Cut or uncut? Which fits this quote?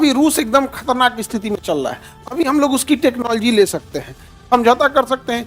uncut